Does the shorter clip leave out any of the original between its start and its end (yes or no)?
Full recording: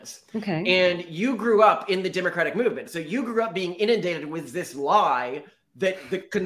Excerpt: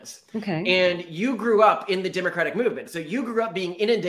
no